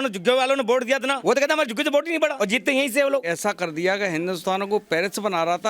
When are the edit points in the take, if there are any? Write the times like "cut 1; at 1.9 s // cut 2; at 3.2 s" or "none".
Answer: cut 1; at 1.2 s // cut 2; at 2.3 s // cut 3; at 3.3 s